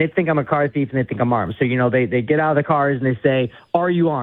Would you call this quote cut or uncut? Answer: uncut